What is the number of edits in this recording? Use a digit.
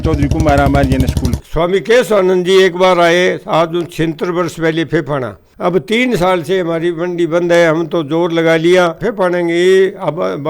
3